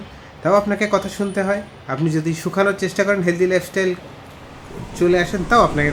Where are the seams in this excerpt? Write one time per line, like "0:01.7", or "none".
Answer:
none